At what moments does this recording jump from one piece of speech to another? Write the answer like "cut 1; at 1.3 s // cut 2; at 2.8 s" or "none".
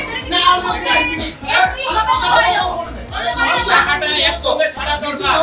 none